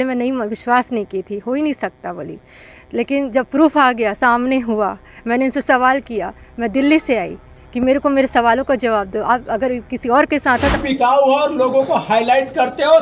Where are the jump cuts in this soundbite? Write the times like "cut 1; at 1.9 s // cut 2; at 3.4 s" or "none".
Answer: cut 1; at 10.8 s